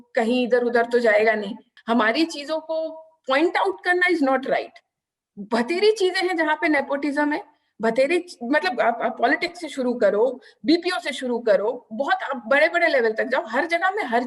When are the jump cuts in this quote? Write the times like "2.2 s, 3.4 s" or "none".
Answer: 1.7 s